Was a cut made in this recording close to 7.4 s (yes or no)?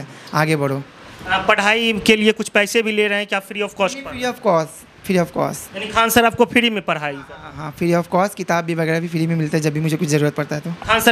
no